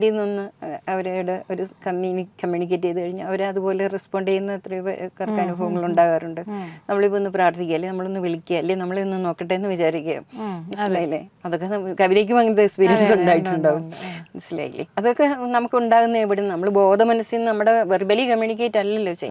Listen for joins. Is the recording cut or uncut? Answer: uncut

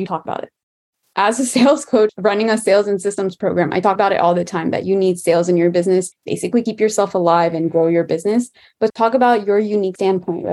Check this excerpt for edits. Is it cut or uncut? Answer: uncut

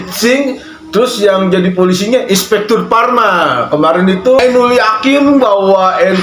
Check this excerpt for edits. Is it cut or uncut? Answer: cut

